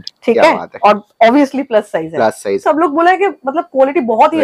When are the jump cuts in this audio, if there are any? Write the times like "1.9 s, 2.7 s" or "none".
2.6 s